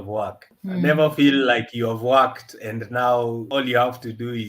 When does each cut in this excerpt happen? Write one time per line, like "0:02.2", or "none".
0:03.4